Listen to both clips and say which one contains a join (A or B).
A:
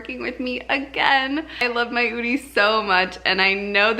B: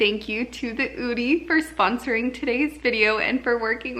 A